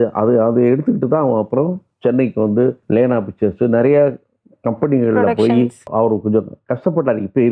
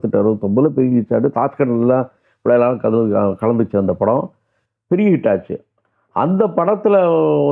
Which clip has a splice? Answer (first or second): first